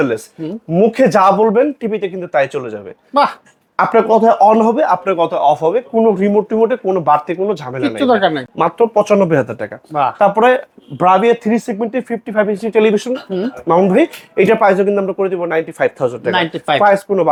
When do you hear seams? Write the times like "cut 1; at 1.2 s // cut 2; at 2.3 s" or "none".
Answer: none

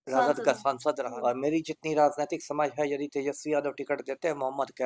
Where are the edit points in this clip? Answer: cut 1; at 1.1 s

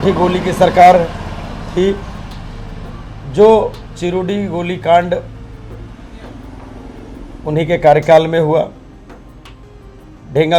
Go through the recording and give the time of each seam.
none

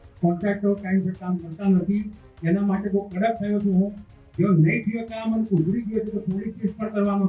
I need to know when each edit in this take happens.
none

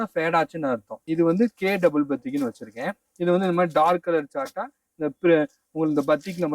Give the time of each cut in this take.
cut 1; at 1.0 s

